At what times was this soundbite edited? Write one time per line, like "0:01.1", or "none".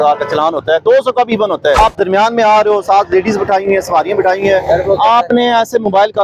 0:01.8